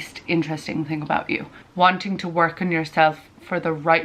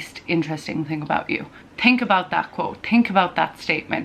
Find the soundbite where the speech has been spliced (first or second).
first